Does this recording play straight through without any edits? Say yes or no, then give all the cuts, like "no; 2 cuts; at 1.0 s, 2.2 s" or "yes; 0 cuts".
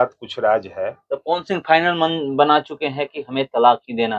yes; 0 cuts